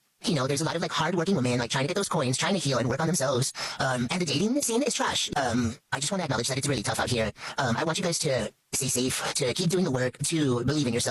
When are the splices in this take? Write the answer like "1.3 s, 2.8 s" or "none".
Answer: 5.3 s